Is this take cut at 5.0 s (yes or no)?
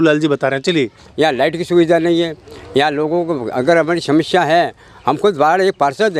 no